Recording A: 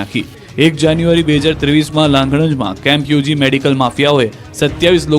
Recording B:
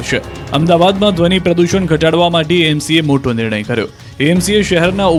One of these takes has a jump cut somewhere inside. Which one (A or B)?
A